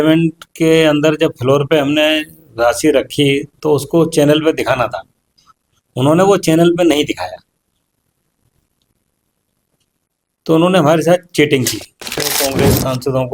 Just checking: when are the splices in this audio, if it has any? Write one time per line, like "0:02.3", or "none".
0:12.3